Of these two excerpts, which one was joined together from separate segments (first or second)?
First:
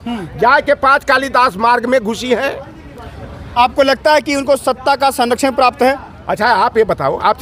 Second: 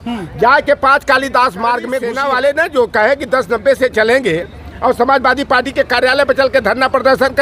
second